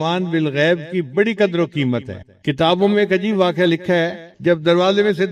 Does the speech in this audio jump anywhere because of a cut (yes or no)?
yes